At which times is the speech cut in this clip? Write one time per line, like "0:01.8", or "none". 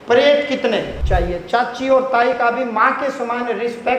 0:01.0